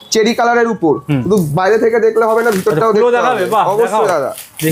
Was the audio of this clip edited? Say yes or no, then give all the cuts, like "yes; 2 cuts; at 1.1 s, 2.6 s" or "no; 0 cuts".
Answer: no; 0 cuts